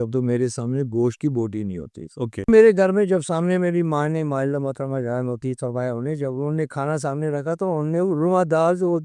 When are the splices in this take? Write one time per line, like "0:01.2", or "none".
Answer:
0:02.5

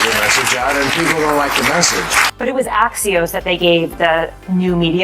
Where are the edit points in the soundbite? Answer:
0:02.3

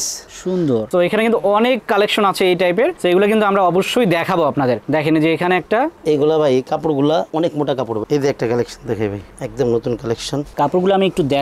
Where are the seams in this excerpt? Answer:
0:00.9
0:08.0
0:10.5

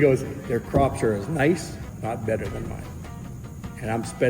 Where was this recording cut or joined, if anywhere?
0:01.9

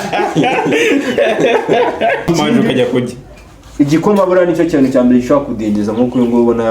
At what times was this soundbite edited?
0:02.3

